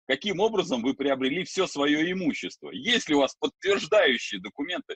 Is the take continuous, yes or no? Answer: yes